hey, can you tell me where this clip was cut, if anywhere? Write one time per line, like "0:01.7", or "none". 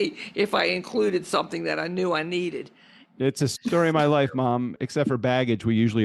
0:03.5
0:04.8